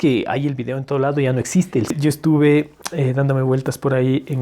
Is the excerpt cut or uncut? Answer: cut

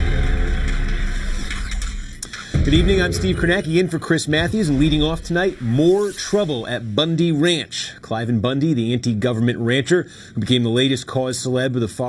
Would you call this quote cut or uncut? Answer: uncut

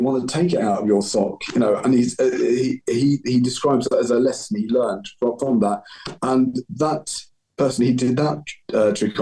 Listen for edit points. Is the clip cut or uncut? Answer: uncut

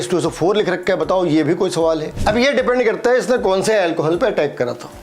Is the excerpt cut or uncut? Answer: cut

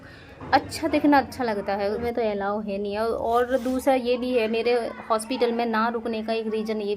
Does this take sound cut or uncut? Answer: cut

